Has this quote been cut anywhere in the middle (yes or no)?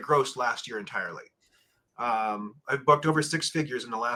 no